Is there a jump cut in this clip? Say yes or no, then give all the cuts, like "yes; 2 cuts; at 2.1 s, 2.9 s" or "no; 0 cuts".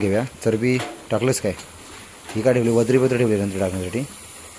no; 0 cuts